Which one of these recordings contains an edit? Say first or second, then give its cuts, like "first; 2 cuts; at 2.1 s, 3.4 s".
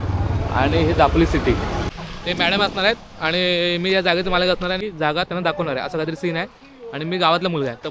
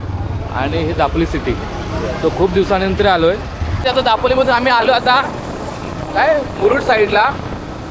first; 2 cuts; at 2.0 s, 4.8 s